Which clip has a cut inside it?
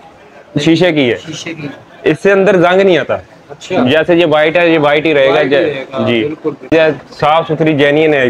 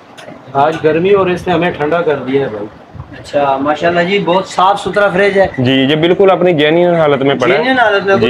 first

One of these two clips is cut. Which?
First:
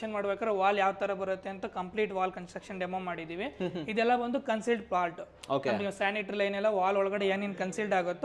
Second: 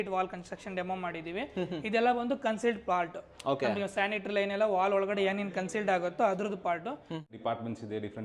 second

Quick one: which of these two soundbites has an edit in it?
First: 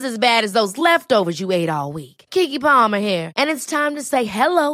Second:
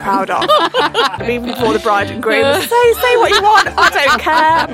second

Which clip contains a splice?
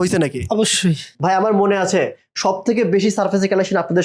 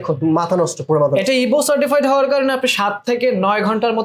first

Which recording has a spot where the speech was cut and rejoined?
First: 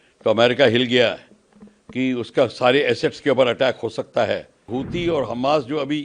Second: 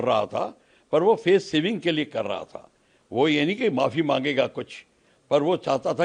first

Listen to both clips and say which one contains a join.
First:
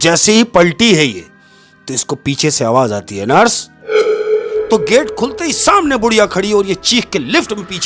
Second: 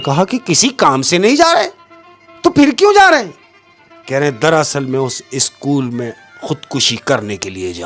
first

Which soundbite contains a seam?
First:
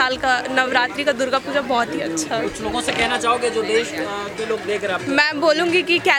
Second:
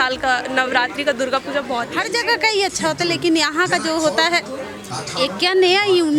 second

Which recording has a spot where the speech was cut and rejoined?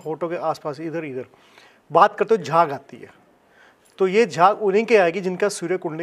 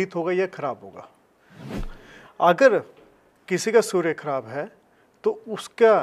second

